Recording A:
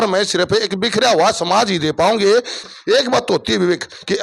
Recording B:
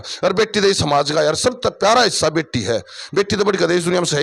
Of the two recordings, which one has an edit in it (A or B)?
A